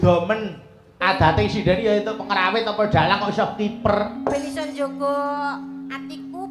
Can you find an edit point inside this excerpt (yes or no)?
no